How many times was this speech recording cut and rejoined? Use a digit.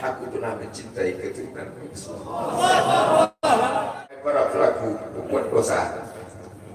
1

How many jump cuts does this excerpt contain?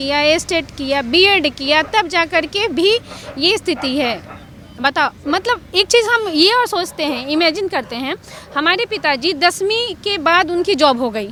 0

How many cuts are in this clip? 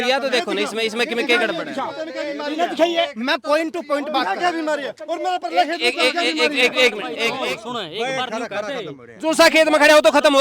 1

